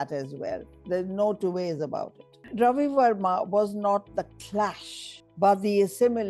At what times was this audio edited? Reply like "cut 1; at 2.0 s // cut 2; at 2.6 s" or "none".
cut 1; at 2.5 s